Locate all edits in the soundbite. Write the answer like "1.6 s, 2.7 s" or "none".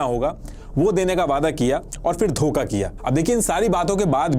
none

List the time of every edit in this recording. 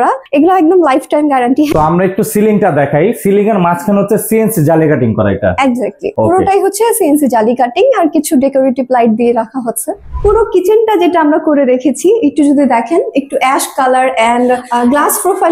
1.7 s, 6.0 s, 10.0 s, 14.7 s

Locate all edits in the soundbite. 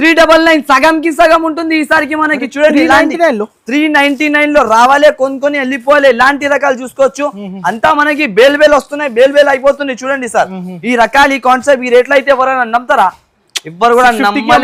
none

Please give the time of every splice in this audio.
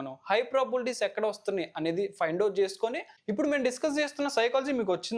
3.1 s

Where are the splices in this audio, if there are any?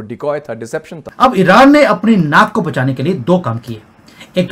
1.1 s

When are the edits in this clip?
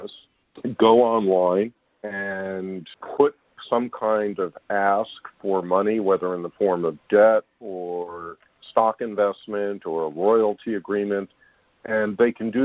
2.9 s, 3.6 s

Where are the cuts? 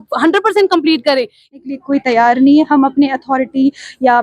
1.5 s

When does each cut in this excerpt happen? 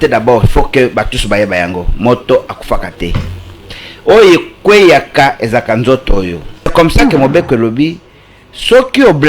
6.7 s

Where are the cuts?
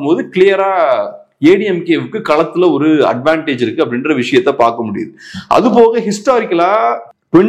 none

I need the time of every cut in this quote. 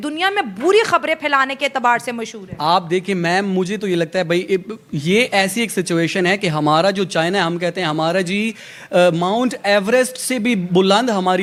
none

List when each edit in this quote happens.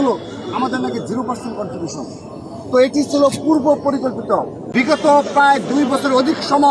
4.6 s

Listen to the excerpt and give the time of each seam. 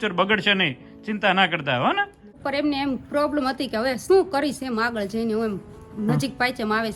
2.2 s

